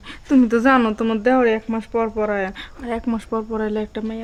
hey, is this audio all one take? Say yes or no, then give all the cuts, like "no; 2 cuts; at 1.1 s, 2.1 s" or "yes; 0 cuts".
yes; 0 cuts